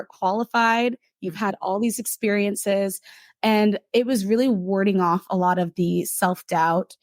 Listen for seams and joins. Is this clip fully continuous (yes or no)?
yes